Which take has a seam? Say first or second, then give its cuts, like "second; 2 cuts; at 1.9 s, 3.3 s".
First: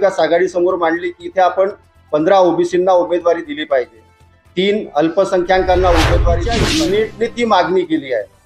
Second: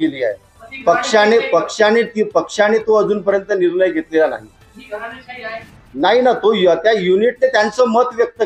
first; 1 cut; at 6.5 s